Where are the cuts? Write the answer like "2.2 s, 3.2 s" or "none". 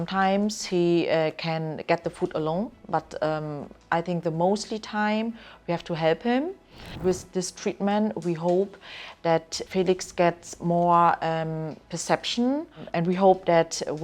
6.9 s, 9.6 s, 12.8 s